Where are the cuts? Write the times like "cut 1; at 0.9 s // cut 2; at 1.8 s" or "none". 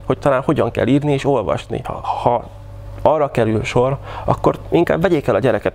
cut 1; at 1.9 s